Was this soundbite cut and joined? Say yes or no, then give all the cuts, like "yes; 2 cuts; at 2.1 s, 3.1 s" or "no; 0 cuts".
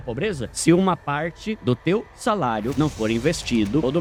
no; 0 cuts